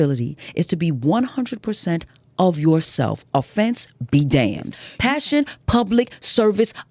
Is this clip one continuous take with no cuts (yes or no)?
no